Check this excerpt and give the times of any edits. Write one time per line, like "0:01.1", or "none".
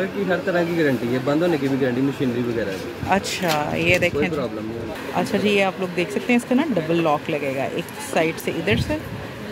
0:05.0